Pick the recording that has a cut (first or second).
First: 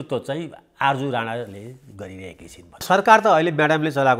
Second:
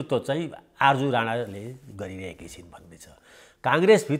first